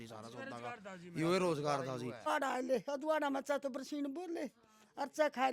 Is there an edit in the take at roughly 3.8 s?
no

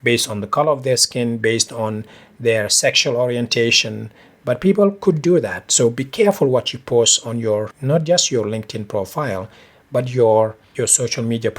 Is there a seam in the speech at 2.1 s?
no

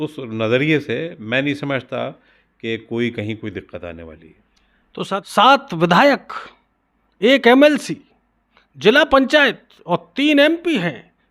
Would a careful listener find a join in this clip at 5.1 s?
yes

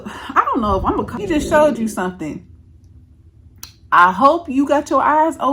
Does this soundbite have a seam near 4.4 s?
no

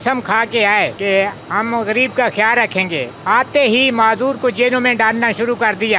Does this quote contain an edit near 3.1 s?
no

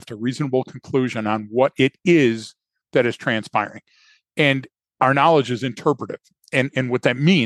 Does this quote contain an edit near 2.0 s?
no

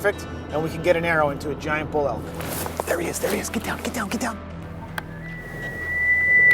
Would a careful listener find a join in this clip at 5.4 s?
no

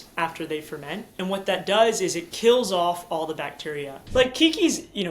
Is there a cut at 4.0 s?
yes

